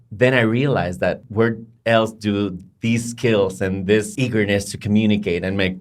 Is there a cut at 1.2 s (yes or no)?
yes